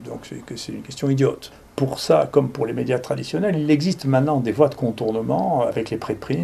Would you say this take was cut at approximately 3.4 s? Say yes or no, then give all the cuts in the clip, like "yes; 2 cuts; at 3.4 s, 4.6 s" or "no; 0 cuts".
no; 1 cut; at 1.5 s